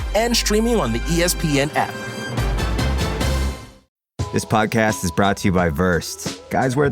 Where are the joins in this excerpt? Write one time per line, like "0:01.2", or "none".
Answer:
0:03.9